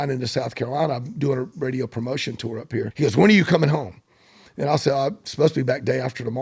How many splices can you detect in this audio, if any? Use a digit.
1